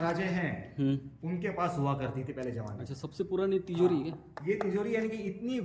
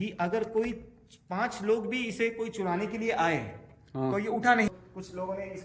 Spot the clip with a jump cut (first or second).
second